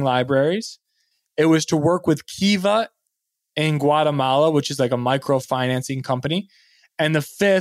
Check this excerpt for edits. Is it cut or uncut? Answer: uncut